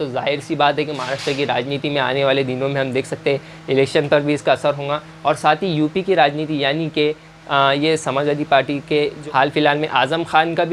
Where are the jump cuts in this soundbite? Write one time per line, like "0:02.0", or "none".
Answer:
0:09.2

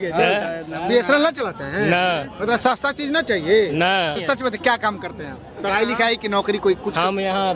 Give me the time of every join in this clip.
0:04.2

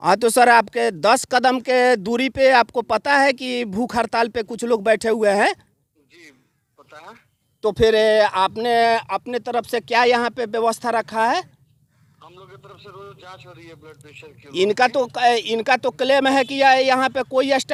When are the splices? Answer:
none

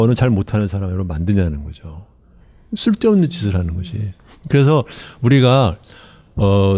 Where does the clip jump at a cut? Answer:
none

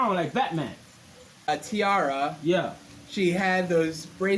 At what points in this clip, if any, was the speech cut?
0:01.5

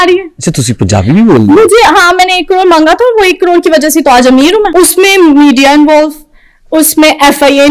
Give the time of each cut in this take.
0:04.7

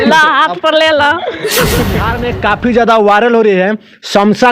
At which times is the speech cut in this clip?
0:02.1

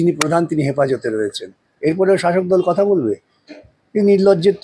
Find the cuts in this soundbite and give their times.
none

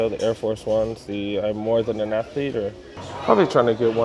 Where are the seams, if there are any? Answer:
0:03.1

